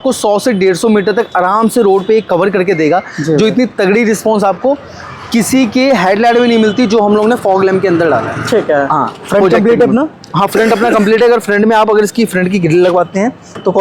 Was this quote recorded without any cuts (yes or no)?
yes